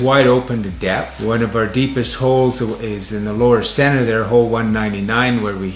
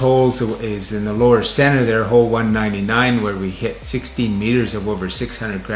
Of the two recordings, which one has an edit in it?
first; 1 cut; at 1.1 s

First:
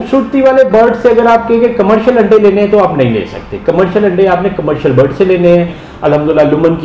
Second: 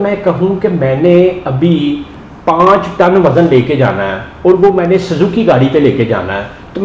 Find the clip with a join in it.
first; 1 cut; at 5.8 s

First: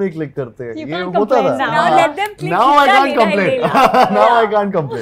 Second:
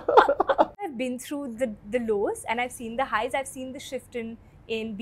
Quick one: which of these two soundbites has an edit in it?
second; 1 cut; at 0.9 s

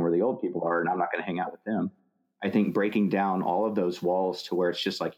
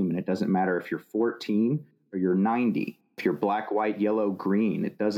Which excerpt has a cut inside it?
second; 1 cut; at 3.0 s

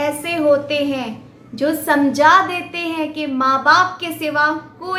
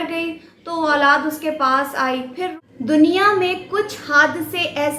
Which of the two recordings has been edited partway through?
second; 1 cut; at 2.6 s

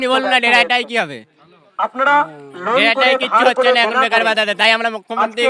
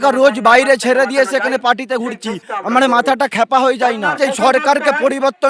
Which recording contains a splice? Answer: second; 1 cut; at 4.2 s

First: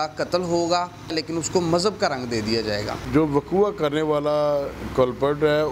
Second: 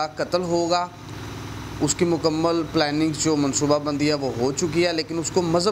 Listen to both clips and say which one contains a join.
first; 2 cuts; at 1.1 s, 3.0 s

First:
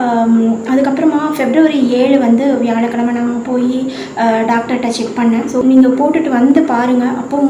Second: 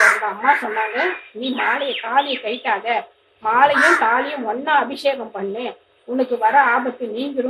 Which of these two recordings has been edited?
first; 1 cut; at 5.6 s

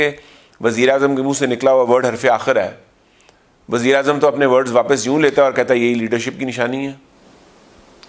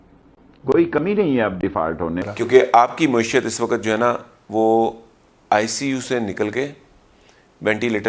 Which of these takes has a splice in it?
second; 1 cut; at 2.2 s

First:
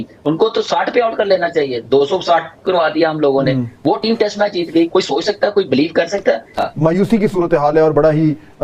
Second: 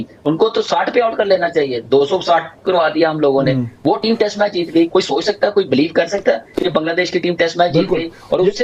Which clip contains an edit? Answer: first; 1 cut; at 6.5 s

